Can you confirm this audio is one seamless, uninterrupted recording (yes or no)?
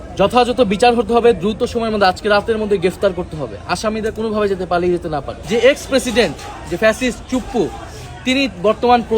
no